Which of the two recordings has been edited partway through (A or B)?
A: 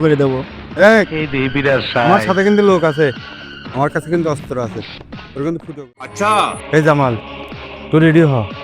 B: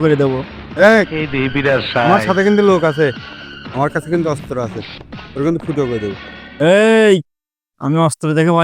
A